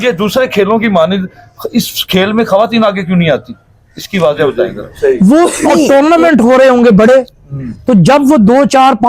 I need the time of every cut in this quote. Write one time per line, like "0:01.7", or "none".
0:04.4